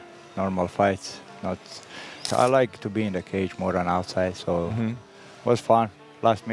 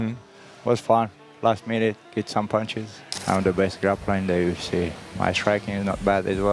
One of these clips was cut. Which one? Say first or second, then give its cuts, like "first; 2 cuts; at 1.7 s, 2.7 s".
second; 1 cut; at 3.1 s